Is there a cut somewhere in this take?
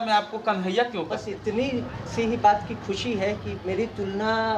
yes; 1 cut; at 1.3 s

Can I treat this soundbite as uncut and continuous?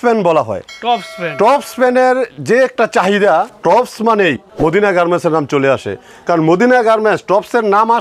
no; 2 cuts; at 3.5 s, 4.5 s

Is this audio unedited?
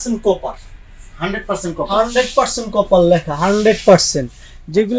yes; 0 cuts

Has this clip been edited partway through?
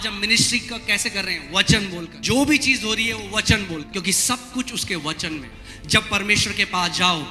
yes; 3 cuts; at 2.1 s, 3.9 s, 5.6 s

